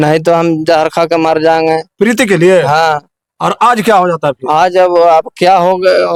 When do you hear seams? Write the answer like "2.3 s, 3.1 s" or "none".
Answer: none